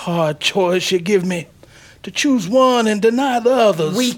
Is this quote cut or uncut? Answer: uncut